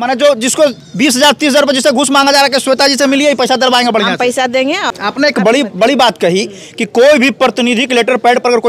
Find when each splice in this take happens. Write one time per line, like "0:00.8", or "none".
0:04.8